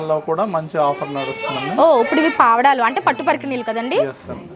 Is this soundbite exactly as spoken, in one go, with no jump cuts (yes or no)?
yes